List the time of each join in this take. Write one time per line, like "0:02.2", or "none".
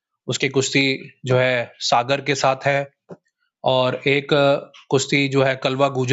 none